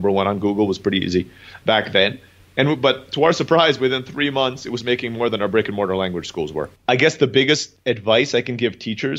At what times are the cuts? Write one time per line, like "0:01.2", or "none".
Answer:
0:06.7
0:07.7